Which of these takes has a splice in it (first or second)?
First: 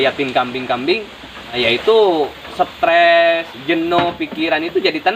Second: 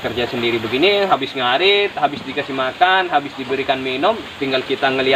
first